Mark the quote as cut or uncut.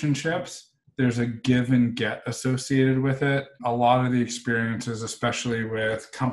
cut